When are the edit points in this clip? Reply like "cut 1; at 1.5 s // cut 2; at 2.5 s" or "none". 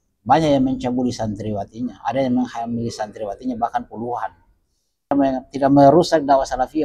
cut 1; at 5.1 s